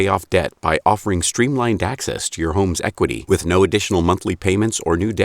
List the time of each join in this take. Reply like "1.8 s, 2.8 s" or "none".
none